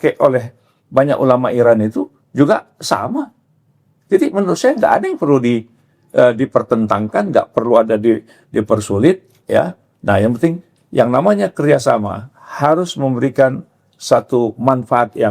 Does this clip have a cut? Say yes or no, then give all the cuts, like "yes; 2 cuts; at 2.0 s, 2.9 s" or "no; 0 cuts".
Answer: no; 0 cuts